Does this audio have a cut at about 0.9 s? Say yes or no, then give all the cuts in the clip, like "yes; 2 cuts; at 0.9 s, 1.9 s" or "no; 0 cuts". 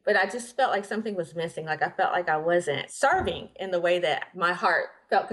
no; 2 cuts; at 2.9 s, 4.3 s